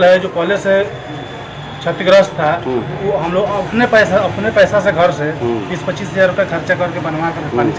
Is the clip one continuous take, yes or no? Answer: yes